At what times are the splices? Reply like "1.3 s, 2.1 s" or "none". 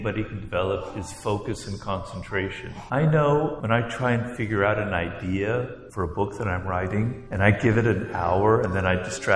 2.7 s, 3.6 s, 5.8 s, 7.2 s